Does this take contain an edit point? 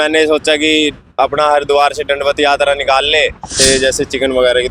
yes; 1 cut; at 3.6 s

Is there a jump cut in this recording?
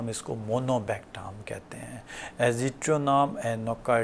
no; 0 cuts

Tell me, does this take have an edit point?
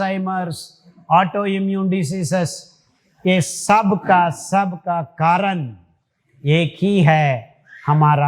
no; 0 cuts

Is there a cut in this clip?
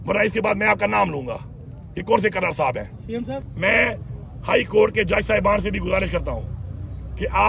yes; 1 cut; at 3.4 s

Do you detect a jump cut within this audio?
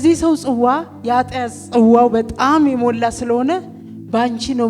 no; 0 cuts

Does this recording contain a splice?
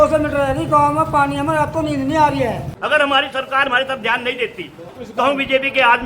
yes; 2 cuts; at 2.7 s, 4.8 s

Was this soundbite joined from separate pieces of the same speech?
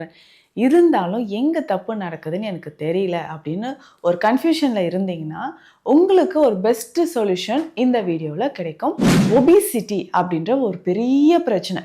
yes; 1 cut; at 9.1 s

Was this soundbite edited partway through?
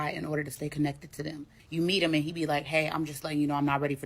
yes; 1 cut; at 1.5 s

